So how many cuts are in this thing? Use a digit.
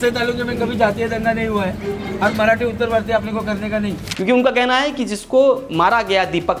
1